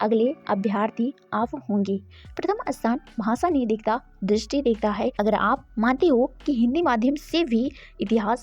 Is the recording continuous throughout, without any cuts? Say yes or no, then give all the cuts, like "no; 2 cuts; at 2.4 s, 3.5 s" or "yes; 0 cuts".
no; 1 cut; at 5.1 s